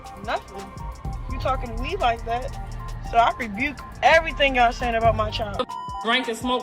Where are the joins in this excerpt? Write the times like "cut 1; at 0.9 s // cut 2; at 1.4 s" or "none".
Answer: cut 1; at 5.6 s